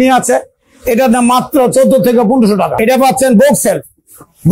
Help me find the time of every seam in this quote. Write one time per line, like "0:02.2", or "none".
0:02.7

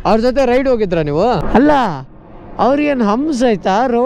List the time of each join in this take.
0:01.4

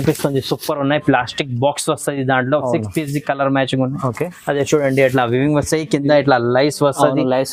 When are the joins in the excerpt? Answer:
none

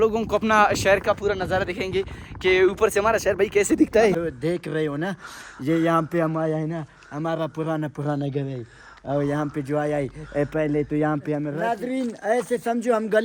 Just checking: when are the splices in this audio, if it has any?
0:04.2
0:11.5

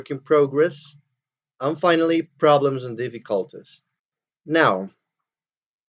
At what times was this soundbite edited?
0:01.8

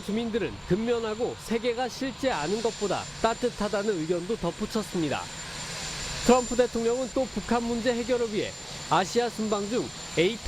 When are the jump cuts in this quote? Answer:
0:09.1

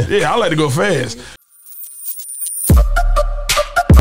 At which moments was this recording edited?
0:01.3

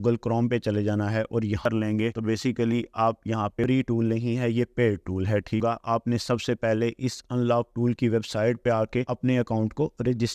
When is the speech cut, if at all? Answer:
0:01.6
0:03.6
0:05.6

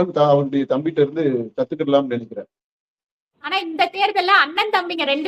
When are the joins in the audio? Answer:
0:03.3

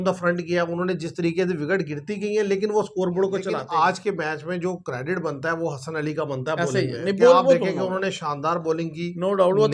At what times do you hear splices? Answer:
0:03.6

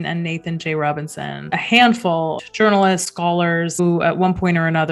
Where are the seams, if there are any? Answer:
0:01.5
0:02.4
0:03.8

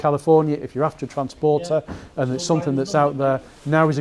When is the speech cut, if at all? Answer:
none

